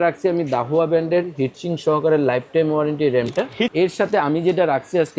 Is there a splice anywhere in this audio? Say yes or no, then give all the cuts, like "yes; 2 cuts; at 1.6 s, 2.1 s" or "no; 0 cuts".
yes; 1 cut; at 3.7 s